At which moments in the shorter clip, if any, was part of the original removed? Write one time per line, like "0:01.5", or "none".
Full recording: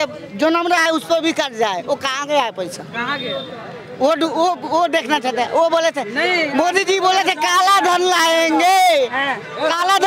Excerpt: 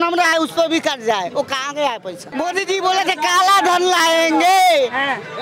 0:02.3